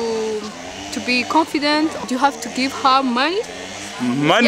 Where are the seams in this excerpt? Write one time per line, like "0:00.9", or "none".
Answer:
0:02.0